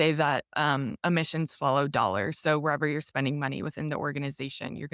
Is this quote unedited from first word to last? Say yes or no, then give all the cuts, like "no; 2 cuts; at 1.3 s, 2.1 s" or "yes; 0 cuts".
yes; 0 cuts